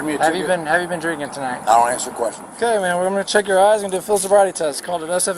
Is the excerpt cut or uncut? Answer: cut